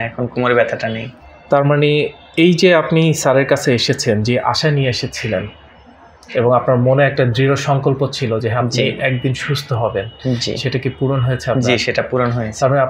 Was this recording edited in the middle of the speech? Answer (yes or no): no